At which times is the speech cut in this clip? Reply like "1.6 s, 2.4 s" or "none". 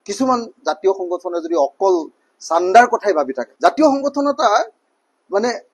3.4 s